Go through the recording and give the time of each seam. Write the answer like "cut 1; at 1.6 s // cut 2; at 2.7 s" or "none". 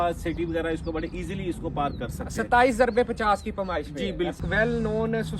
cut 1; at 4.4 s